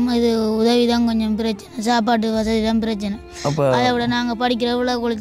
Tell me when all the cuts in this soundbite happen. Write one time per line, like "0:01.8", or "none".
none